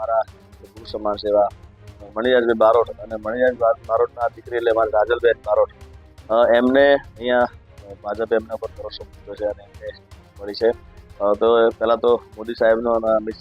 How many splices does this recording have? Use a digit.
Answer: 0